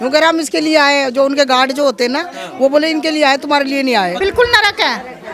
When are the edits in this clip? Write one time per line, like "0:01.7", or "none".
0:04.2